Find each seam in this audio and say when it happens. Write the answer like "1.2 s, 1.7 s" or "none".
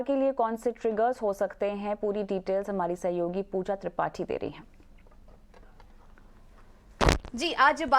6.6 s

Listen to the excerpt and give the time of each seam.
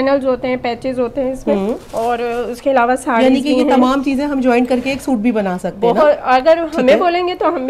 none

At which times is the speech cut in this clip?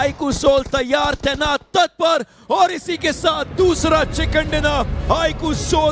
none

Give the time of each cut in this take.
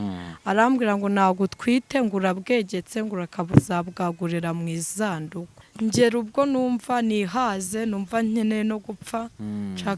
5.6 s

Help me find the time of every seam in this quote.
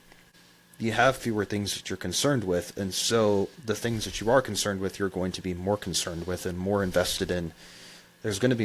none

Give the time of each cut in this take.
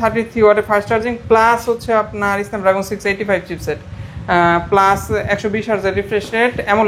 none

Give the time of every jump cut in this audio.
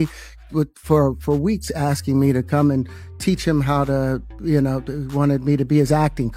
none

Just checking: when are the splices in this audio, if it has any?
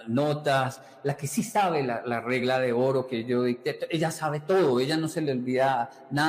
none

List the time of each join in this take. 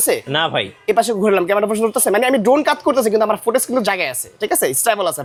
none

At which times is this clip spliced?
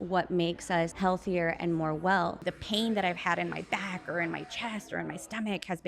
0.9 s, 2.5 s

